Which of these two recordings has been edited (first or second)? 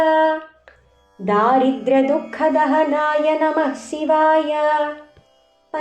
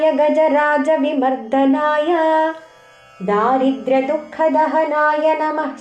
first